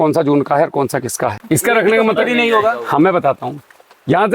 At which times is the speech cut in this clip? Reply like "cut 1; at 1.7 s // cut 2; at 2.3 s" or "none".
cut 1; at 1.3 s